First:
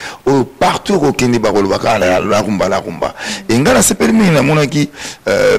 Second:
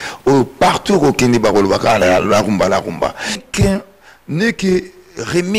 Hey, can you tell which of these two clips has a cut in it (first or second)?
second